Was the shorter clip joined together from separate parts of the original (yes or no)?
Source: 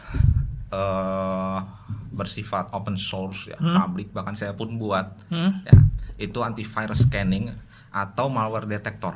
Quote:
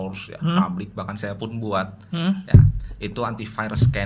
no